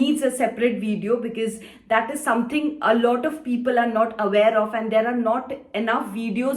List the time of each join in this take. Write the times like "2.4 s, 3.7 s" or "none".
none